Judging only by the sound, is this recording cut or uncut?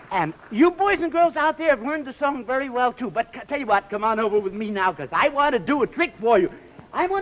cut